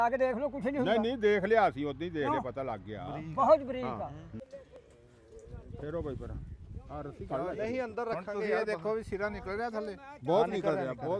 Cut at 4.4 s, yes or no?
yes